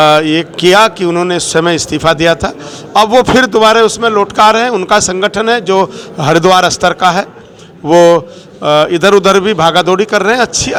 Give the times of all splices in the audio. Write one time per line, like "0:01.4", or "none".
none